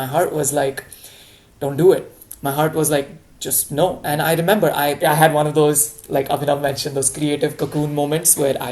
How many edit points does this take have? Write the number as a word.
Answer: one